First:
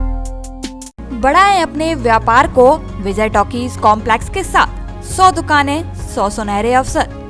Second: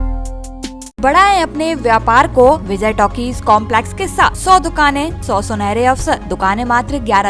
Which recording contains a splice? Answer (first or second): second